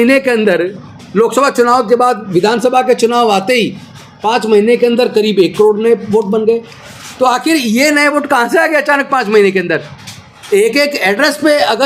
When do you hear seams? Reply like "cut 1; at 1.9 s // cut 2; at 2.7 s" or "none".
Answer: none